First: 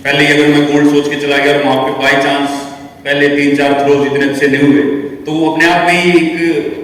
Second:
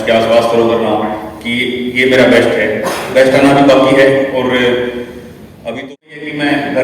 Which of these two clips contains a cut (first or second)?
second